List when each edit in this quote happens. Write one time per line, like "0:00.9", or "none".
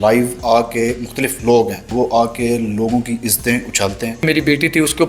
0:01.9
0:04.2